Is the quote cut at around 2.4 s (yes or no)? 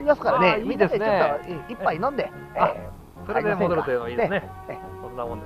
no